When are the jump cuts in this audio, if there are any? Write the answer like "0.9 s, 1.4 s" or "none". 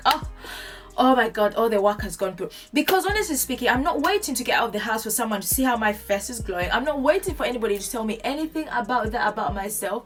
none